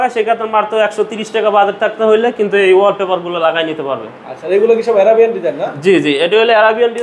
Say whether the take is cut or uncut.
uncut